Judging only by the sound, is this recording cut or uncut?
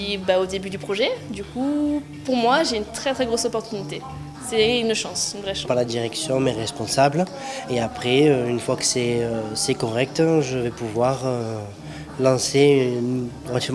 uncut